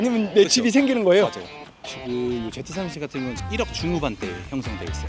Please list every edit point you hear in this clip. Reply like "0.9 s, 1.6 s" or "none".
1.5 s